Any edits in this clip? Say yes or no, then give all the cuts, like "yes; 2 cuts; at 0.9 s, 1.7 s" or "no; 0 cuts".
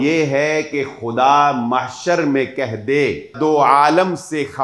yes; 1 cut; at 3.3 s